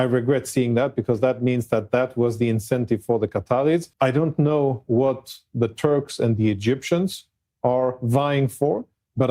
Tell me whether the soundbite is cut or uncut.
cut